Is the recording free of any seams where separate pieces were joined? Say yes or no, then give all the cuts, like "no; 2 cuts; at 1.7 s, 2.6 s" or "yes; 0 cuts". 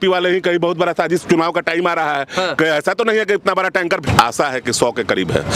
no; 1 cut; at 4.1 s